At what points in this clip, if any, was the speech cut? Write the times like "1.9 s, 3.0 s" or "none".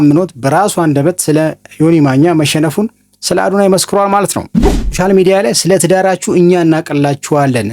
4.9 s